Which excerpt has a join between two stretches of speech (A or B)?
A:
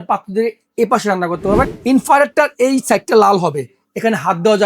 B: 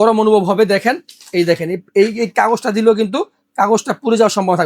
A